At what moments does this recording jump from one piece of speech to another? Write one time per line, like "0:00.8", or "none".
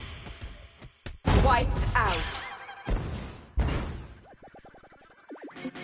none